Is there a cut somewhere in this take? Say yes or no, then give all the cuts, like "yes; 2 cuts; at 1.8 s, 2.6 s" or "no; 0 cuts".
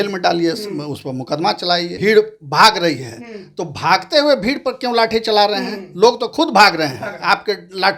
yes; 1 cut; at 1.9 s